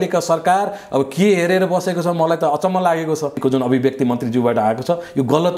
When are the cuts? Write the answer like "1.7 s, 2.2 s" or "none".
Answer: 3.4 s